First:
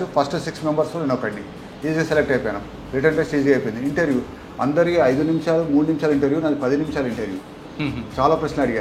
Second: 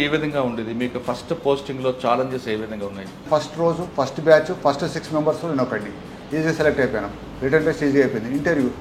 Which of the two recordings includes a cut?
second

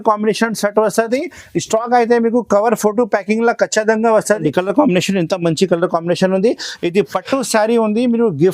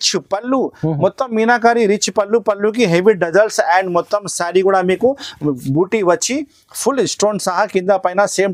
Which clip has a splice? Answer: first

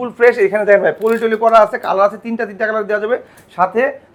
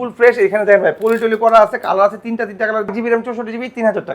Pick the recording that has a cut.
second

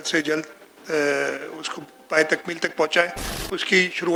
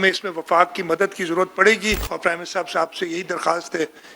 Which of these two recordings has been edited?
second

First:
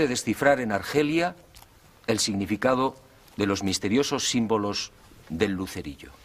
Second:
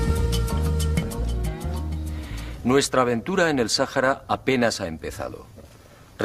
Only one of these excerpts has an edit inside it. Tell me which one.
first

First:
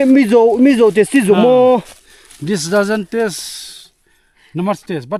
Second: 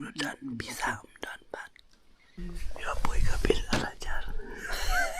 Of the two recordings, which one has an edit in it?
second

